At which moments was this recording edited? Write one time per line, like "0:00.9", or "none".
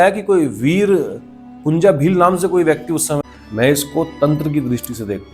0:03.2